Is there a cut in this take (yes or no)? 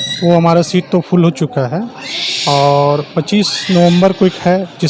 no